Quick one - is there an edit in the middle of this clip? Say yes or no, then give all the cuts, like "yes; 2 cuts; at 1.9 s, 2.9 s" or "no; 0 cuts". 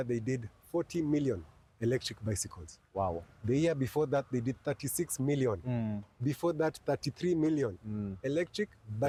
no; 0 cuts